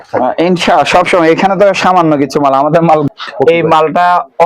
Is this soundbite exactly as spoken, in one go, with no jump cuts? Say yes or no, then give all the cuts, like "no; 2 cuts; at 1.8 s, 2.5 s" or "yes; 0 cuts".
no; 1 cut; at 3.1 s